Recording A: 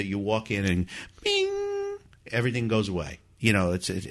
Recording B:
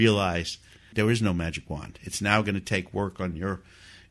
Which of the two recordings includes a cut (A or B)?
B